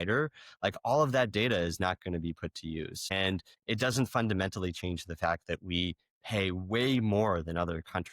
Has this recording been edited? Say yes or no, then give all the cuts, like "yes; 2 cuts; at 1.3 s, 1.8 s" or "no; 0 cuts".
yes; 1 cut; at 3.5 s